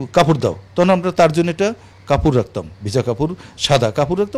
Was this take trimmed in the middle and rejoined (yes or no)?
no